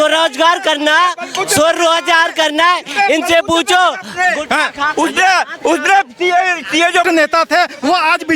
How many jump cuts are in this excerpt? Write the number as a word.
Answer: one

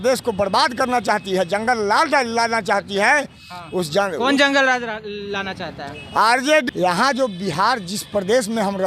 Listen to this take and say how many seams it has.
one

